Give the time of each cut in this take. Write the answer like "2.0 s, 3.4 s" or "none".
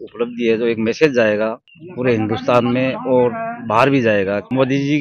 none